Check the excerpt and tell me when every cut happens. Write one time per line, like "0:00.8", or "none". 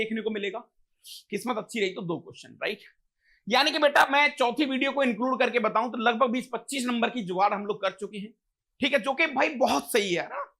none